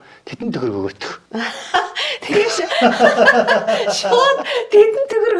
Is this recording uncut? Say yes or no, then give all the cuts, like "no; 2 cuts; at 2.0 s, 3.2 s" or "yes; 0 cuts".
no; 1 cut; at 1.1 s